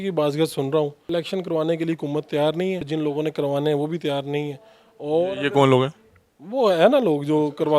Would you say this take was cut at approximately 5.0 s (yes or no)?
no